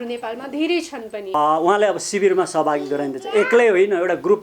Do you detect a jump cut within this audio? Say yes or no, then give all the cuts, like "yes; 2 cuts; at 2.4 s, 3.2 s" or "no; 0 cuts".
yes; 1 cut; at 1.3 s